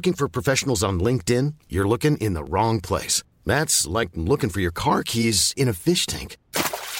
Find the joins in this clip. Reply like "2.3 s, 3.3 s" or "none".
none